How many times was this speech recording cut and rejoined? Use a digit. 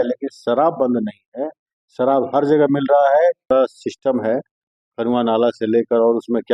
1